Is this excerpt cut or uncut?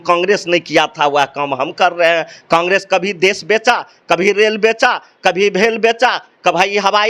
uncut